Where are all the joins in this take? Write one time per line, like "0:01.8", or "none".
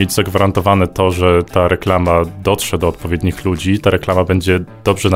none